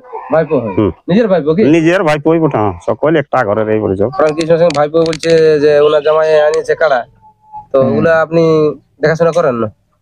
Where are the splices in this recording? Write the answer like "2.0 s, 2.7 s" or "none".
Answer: 4.1 s